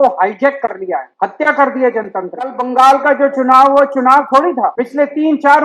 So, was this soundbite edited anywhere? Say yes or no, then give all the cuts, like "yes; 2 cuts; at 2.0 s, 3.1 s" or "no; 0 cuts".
yes; 3 cuts; at 1.1 s, 2.6 s, 4.8 s